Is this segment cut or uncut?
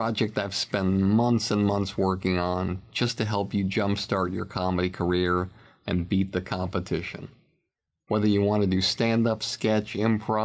uncut